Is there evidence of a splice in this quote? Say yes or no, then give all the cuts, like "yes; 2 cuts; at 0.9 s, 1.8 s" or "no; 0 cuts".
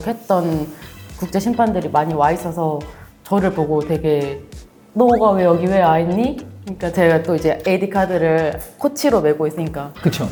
no; 0 cuts